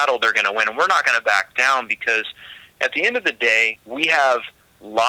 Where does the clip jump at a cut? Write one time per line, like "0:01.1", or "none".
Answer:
0:03.8